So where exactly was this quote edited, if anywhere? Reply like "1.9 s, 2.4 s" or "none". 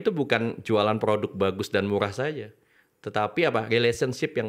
none